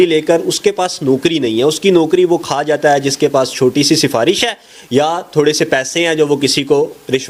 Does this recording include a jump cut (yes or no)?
no